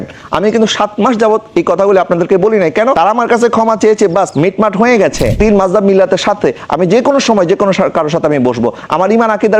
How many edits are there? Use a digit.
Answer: 2